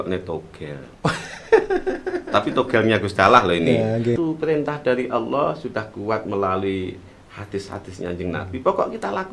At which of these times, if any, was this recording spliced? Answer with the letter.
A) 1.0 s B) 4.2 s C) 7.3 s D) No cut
B